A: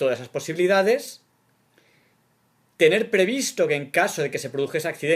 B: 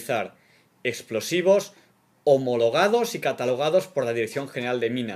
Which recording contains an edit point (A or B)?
A